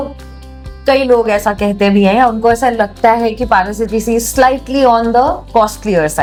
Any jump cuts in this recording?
no; 0 cuts

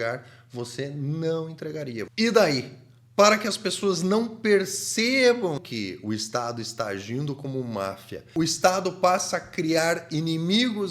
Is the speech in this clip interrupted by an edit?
yes; 3 cuts; at 2.1 s, 5.6 s, 8.1 s

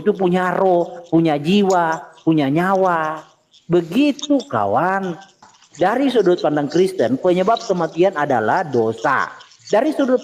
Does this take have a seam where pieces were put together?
yes; 1 cut; at 5.5 s

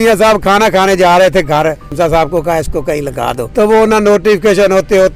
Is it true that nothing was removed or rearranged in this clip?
no; 2 cuts; at 1.9 s, 3.4 s

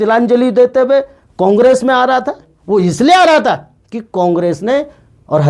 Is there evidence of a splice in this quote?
no; 0 cuts

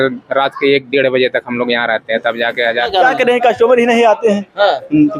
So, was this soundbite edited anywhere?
yes; 1 cut; at 2.9 s

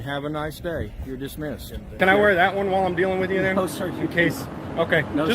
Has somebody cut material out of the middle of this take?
yes; 1 cut; at 1.9 s

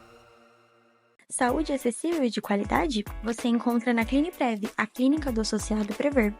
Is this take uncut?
no; 1 cut; at 1.1 s

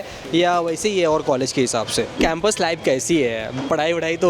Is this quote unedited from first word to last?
no; 1 cut; at 2.2 s

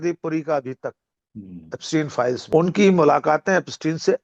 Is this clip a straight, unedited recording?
no; 1 cut; at 2.4 s

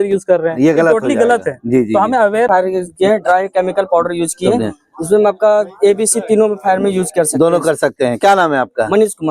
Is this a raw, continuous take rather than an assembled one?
no; 1 cut; at 2.5 s

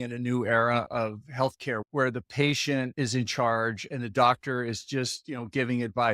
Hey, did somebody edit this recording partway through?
yes; 3 cuts; at 0.9 s, 1.9 s, 2.9 s

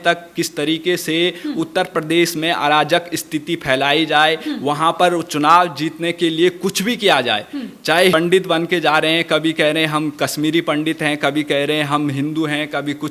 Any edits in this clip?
no; 0 cuts

